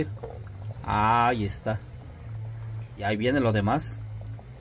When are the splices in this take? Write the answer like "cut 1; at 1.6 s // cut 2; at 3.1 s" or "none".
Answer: cut 1; at 3.0 s